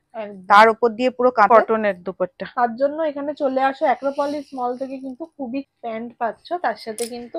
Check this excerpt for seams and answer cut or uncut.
cut